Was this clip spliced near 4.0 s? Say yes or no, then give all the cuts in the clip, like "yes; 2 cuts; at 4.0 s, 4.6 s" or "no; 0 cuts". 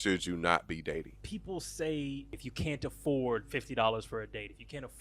no; 2 cuts; at 1.2 s, 2.4 s